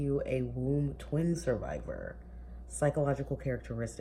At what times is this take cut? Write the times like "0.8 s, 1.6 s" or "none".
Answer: none